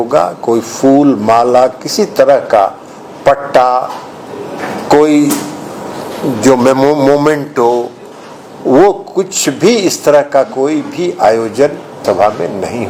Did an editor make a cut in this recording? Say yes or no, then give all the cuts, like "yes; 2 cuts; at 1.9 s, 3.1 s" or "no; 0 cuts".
no; 0 cuts